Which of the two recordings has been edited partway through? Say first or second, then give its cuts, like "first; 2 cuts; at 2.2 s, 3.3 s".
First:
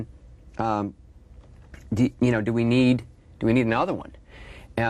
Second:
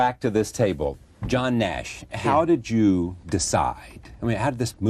second; 1 cut; at 1.3 s